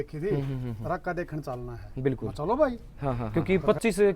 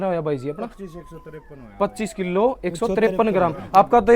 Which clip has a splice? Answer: first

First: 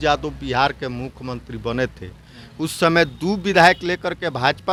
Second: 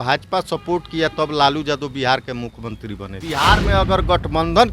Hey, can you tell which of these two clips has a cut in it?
second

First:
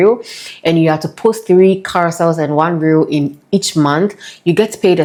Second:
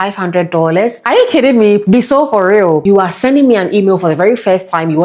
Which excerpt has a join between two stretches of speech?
second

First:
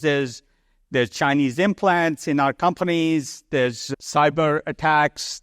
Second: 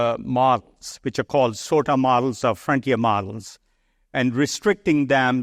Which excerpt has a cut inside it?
first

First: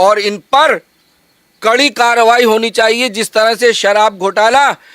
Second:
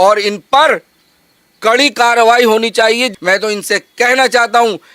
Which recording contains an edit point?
second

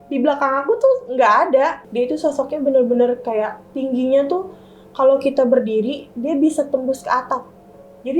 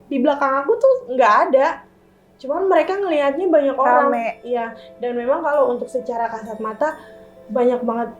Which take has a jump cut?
first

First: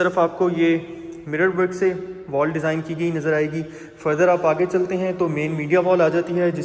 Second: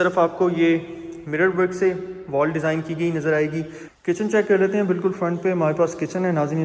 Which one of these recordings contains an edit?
second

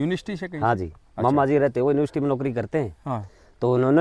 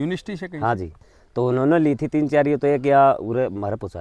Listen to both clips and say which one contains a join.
second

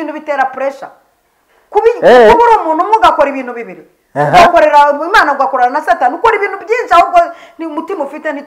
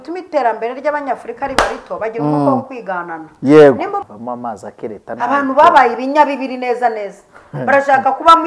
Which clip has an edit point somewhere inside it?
second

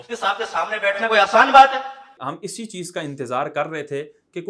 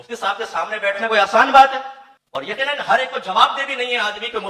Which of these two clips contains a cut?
first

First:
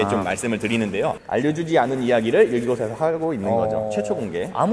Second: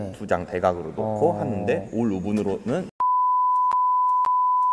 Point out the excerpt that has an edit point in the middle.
first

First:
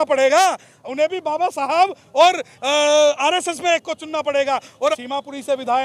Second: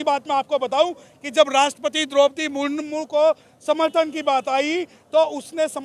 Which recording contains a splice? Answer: first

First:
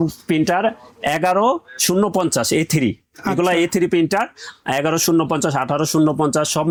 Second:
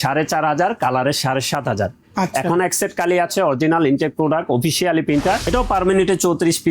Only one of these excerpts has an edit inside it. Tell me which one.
second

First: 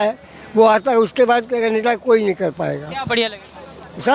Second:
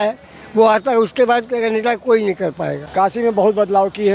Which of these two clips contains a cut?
second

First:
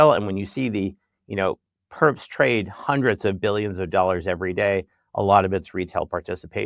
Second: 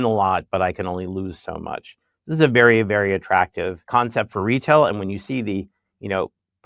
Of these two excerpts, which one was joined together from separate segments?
second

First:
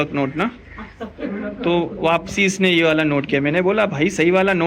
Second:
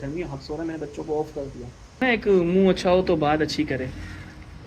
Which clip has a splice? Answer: second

